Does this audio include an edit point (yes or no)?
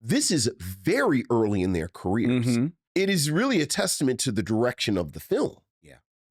yes